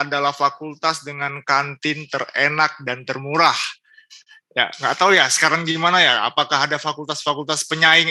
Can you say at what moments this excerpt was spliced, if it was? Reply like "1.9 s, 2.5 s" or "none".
none

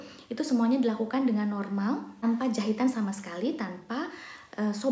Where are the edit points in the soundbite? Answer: 2.2 s

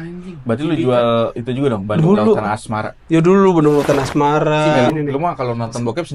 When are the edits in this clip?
4.9 s

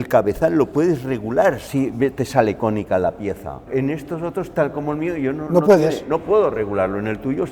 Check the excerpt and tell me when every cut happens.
1.6 s, 3.7 s

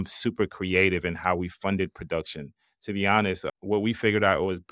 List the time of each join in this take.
none

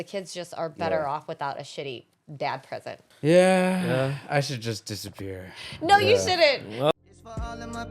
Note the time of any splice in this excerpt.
3.1 s, 6.9 s

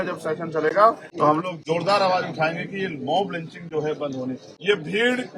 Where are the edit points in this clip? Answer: 1.1 s, 4.5 s

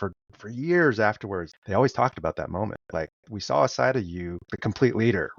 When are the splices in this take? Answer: 1.5 s, 2.8 s, 4.5 s

